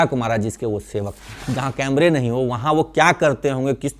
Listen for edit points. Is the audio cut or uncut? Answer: cut